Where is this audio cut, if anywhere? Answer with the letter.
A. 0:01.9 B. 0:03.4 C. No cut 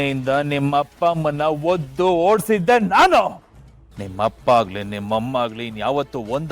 B